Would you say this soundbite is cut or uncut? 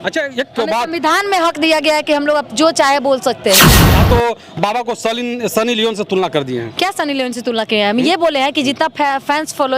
cut